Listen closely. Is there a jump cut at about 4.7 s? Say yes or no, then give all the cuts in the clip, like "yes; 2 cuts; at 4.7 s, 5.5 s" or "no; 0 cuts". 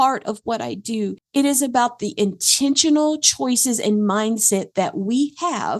no; 1 cut; at 1.2 s